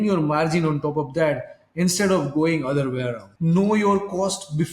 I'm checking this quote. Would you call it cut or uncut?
cut